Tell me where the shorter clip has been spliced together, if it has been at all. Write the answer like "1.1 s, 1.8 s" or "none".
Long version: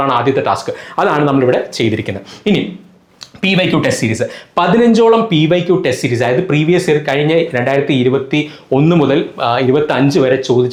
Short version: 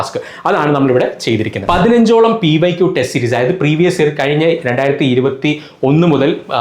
1.6 s